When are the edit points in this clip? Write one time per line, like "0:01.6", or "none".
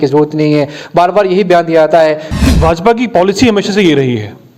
0:02.3